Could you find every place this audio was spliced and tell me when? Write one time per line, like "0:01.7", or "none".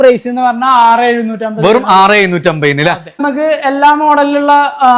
0:03.1